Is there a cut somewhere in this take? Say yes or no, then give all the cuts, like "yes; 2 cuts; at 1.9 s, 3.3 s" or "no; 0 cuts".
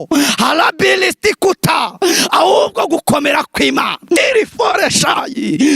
yes; 1 cut; at 4.2 s